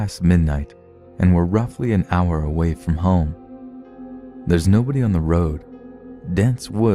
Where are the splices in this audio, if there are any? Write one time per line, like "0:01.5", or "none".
none

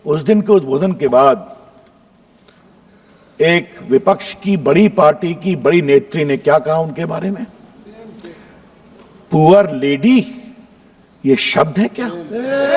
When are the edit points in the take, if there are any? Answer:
none

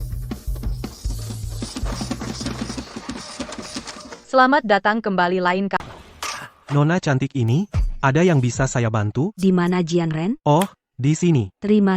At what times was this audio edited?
0:05.8

